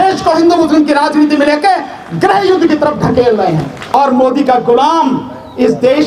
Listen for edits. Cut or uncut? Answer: cut